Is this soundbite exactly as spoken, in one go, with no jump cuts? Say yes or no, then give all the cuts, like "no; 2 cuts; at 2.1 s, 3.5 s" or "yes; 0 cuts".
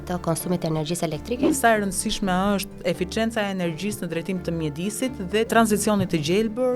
no; 2 cuts; at 1.5 s, 5.5 s